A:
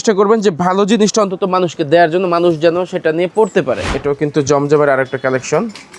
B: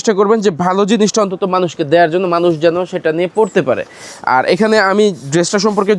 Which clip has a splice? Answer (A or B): A